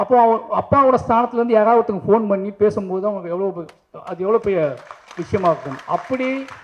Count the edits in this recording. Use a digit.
0